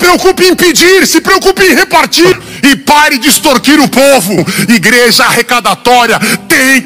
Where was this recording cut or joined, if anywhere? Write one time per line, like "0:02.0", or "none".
0:02.3